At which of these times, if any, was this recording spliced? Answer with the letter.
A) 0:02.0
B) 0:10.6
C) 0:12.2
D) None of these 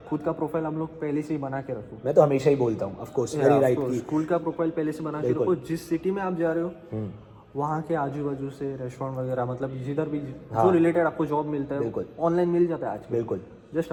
D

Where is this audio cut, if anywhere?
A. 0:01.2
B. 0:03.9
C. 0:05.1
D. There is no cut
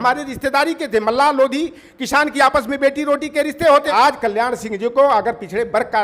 B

